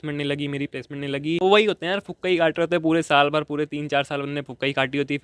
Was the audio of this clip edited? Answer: yes; 1 cut; at 1.4 s

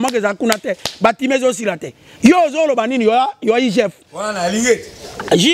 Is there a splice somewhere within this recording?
no; 0 cuts

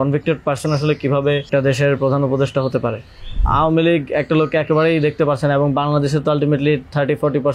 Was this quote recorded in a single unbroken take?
no; 2 cuts; at 1.5 s, 3.4 s

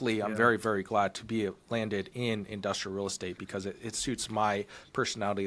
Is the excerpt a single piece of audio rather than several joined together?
yes; 0 cuts

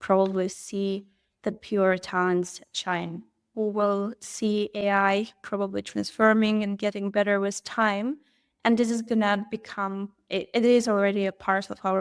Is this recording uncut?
no; 1 cut; at 3.5 s

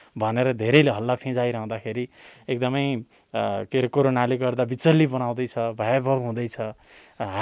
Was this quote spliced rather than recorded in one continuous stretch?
no; 0 cuts

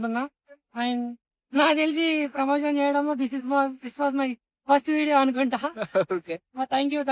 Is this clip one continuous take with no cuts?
yes; 0 cuts

